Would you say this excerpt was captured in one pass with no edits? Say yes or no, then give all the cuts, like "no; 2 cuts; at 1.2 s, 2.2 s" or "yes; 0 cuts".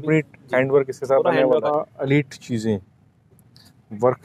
no; 1 cut; at 1.7 s